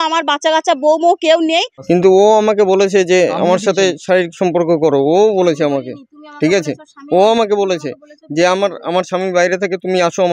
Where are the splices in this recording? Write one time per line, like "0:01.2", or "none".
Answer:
0:01.8